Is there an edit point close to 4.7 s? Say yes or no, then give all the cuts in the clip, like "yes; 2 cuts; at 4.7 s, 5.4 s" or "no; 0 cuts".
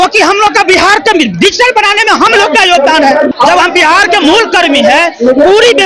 no; 1 cut; at 3.3 s